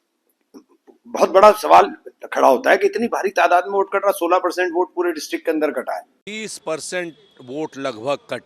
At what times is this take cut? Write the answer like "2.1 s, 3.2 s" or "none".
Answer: 6.2 s